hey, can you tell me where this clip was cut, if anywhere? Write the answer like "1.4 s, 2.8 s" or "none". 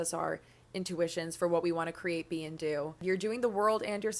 3.0 s